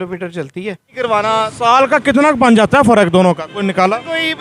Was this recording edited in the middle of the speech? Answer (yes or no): yes